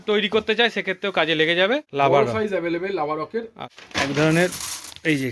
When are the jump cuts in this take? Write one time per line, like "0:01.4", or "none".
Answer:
0:01.9
0:03.3